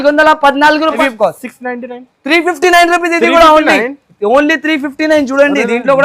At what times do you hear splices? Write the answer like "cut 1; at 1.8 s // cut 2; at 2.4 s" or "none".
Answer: cut 1; at 1.0 s